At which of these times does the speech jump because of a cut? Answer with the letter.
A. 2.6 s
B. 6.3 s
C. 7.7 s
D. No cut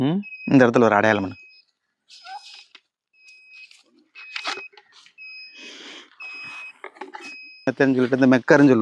C